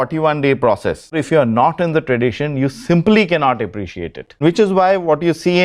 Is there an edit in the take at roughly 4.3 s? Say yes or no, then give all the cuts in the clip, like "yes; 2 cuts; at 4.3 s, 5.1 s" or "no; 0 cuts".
yes; 2 cuts; at 1.2 s, 4.3 s